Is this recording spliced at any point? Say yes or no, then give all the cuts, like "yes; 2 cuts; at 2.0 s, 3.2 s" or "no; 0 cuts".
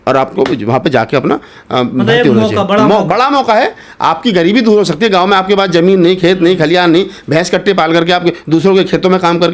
no; 0 cuts